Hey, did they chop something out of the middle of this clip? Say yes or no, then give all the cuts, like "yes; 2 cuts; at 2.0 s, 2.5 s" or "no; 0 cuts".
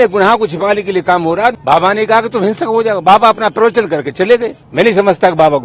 yes; 2 cuts; at 1.6 s, 4.6 s